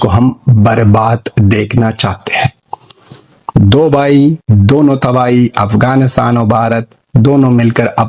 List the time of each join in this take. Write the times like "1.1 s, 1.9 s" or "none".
none